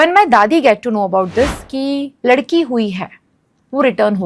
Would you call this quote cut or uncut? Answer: cut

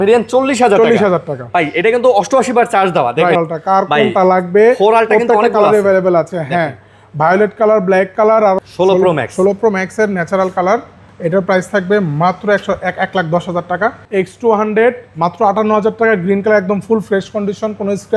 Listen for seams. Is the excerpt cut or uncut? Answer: cut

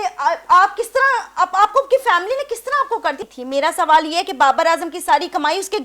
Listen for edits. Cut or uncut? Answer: cut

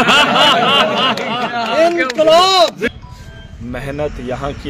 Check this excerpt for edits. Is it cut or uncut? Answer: cut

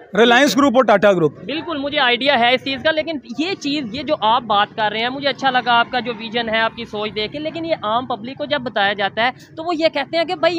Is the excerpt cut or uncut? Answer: uncut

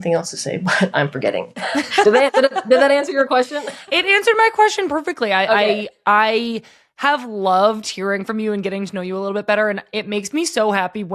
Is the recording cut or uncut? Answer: uncut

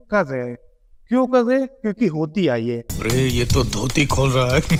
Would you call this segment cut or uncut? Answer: uncut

